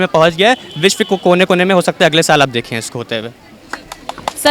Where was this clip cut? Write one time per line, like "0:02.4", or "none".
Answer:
none